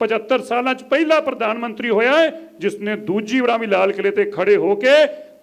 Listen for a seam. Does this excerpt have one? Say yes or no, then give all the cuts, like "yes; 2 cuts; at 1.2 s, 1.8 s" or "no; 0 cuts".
no; 0 cuts